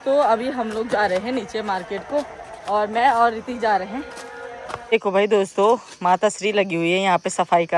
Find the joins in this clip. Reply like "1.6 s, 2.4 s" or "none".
4.7 s